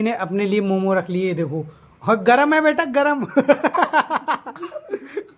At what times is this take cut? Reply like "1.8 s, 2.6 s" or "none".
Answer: none